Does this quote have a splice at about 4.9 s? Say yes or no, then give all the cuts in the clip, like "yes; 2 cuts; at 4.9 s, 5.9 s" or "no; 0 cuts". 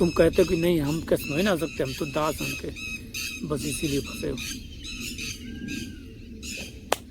no; 0 cuts